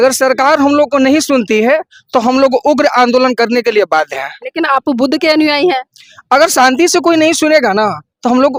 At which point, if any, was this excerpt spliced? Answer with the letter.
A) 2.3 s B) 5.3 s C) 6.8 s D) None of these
D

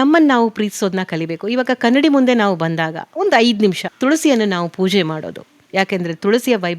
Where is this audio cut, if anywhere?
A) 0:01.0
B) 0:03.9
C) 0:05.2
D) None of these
B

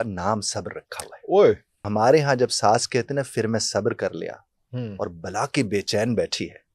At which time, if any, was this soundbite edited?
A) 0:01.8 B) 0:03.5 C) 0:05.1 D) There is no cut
A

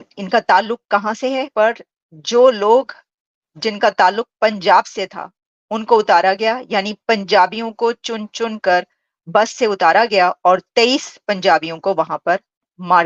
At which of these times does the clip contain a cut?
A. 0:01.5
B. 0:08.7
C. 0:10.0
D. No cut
A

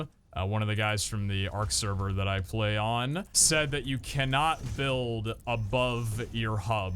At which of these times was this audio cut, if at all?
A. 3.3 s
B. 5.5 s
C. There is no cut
A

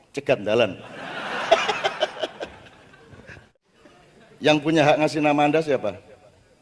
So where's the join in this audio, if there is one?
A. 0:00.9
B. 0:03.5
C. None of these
B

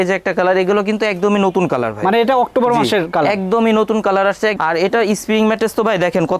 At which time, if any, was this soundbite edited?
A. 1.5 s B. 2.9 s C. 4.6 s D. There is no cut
C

